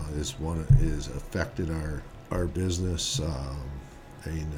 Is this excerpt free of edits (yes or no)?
no